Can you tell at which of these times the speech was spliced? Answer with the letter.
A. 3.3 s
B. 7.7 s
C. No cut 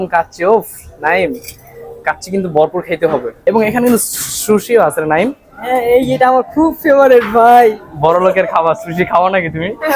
A